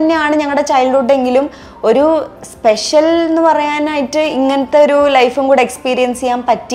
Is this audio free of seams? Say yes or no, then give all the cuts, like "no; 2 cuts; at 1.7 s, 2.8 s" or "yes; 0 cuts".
yes; 0 cuts